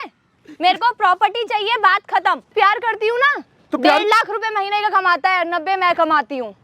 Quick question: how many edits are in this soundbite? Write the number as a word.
one